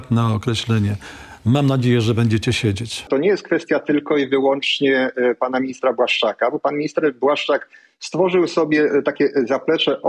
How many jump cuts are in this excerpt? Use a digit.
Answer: 1